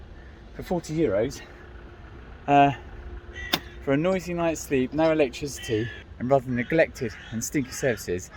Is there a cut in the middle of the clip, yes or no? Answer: no